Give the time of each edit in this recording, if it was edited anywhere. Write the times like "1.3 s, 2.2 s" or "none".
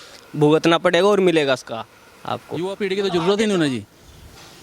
2.6 s